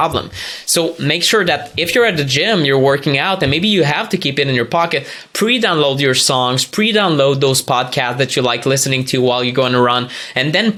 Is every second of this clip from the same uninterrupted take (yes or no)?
yes